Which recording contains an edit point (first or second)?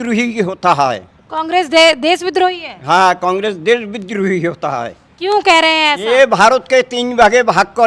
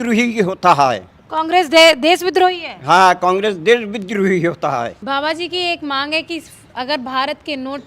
second